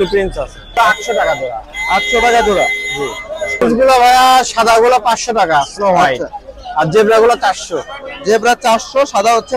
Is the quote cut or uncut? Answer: cut